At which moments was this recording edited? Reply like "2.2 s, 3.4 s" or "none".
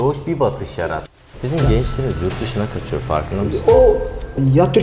1.1 s